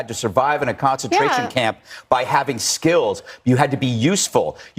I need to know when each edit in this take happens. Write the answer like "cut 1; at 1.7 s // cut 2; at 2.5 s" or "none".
none